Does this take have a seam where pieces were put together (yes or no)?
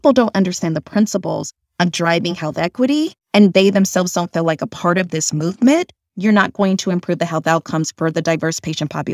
yes